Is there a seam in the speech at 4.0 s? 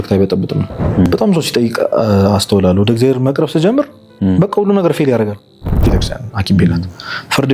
no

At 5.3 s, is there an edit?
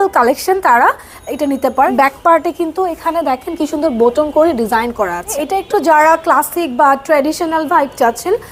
yes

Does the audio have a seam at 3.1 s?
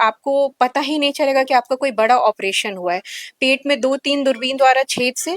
no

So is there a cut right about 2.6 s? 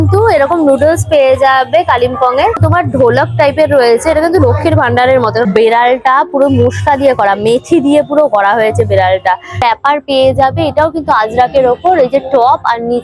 yes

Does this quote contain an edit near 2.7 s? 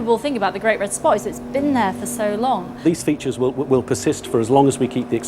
yes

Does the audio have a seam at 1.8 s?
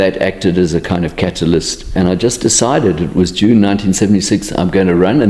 yes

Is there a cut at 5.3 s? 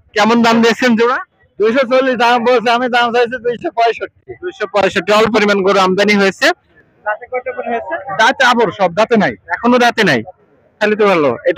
yes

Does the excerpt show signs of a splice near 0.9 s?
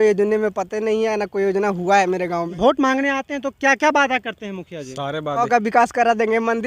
no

